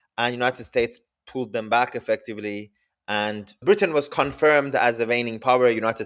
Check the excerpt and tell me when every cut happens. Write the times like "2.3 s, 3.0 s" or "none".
3.6 s